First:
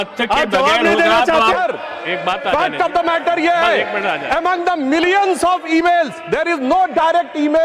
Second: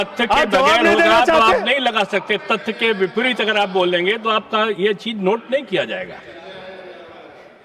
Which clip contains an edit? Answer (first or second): first